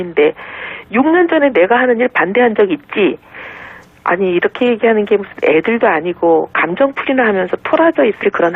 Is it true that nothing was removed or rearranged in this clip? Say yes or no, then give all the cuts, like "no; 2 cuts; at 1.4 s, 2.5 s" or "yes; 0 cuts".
yes; 0 cuts